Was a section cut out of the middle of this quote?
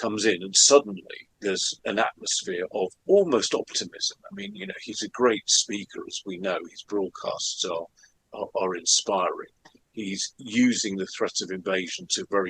yes; 1 cut; at 1.7 s

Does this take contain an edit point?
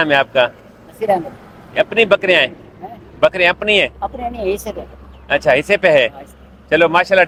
no; 0 cuts

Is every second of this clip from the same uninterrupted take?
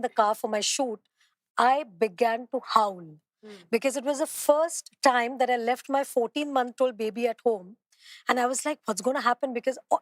yes; 0 cuts

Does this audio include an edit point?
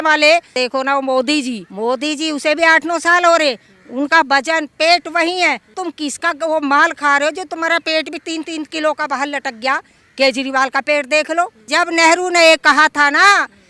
yes; 2 cuts; at 1.7 s, 11.7 s

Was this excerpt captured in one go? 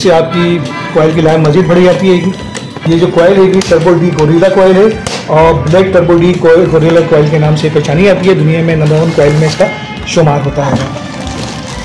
yes; 0 cuts

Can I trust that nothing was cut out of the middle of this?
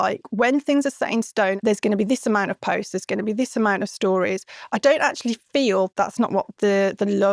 no; 2 cuts; at 1.6 s, 5.9 s

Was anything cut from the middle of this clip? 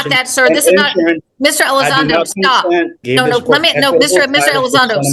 yes; 1 cut; at 3.0 s

